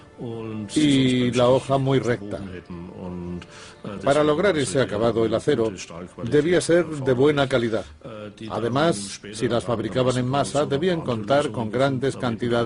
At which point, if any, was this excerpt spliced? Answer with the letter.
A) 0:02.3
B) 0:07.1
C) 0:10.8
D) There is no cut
C